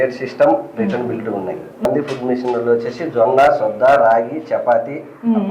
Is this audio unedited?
no; 1 cut; at 1.9 s

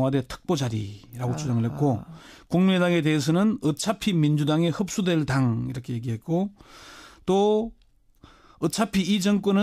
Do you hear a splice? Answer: yes; 1 cut; at 5.6 s

